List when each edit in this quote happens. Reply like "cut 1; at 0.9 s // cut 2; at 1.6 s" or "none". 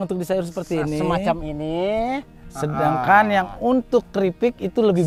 none